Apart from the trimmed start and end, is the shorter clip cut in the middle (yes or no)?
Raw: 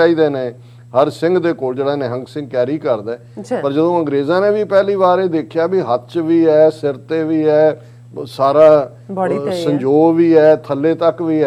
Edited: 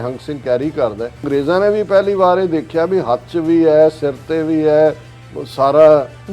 yes